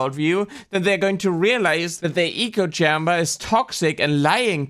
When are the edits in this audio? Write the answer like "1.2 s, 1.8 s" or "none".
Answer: 2.0 s